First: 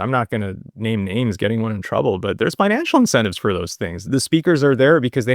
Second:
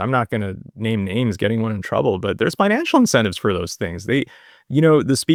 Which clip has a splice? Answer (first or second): first